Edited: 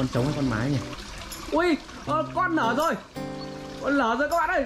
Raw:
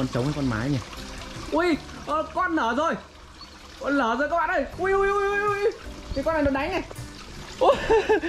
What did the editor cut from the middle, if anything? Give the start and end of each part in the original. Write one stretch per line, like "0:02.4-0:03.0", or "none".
none

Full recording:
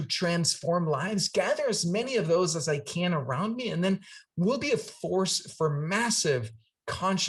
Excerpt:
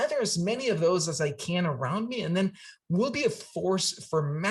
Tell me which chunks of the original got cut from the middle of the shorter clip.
none

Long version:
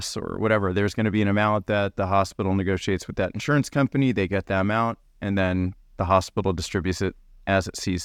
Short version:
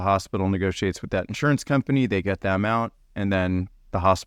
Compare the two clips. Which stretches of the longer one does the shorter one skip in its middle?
none

